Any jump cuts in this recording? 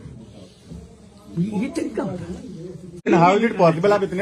yes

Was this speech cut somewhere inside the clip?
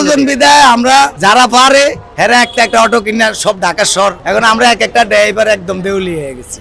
yes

